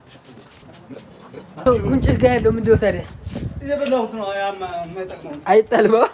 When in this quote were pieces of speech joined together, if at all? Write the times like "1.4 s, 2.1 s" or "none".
1.7 s